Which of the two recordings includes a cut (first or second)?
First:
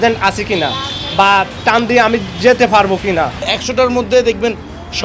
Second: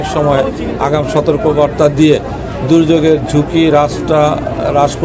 first